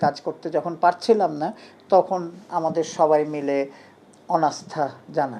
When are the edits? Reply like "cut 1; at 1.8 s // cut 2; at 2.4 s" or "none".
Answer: none